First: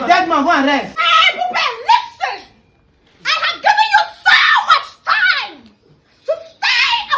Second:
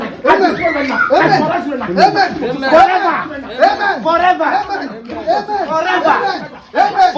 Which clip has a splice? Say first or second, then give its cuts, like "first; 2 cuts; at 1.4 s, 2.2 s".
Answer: first; 1 cut; at 1.0 s